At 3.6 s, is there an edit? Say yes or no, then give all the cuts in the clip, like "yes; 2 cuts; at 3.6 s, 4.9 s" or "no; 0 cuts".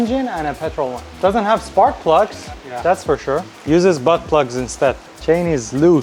no; 2 cuts; at 1.1 s, 5.1 s